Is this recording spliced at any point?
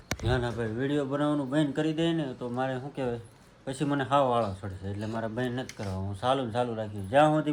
no; 0 cuts

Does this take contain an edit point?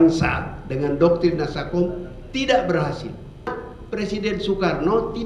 yes; 1 cut; at 3.5 s

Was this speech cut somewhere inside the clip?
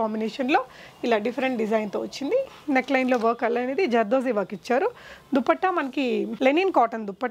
yes; 2 cuts; at 2.5 s, 6.3 s

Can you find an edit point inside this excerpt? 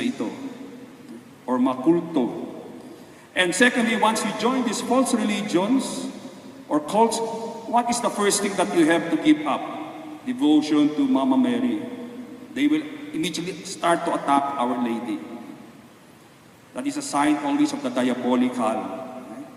no; 0 cuts

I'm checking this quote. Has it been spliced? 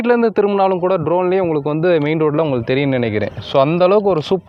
no; 0 cuts

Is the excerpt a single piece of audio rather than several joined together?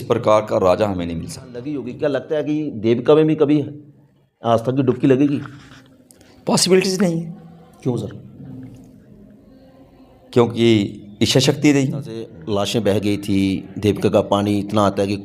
no; 2 cuts; at 1.7 s, 12.3 s

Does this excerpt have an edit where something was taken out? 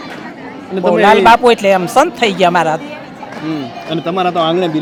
no; 0 cuts

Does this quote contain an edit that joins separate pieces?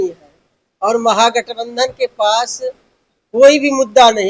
no; 0 cuts

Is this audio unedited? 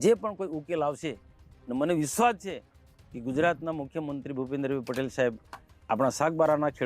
yes; 0 cuts

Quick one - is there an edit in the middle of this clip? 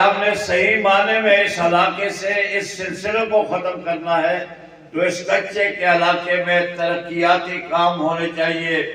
no; 0 cuts

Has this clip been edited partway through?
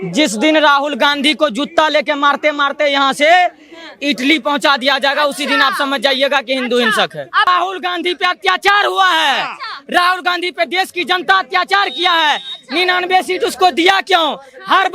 yes; 1 cut; at 7.5 s

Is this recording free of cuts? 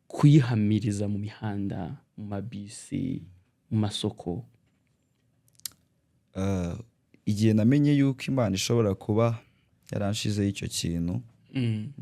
yes; 0 cuts

